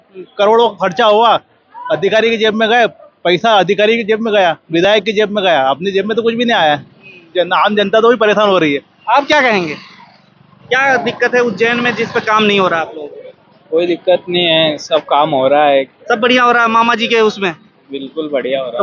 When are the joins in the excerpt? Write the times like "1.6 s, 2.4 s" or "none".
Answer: none

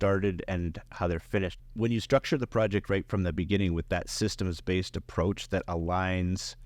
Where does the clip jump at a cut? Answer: 1.6 s

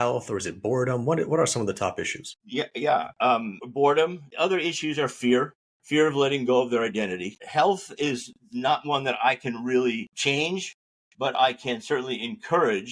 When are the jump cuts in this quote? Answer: 4.2 s

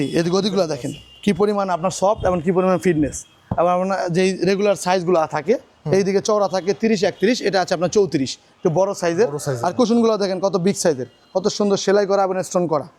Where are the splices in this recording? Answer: none

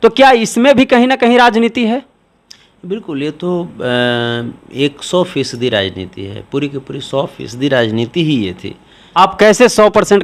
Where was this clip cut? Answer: none

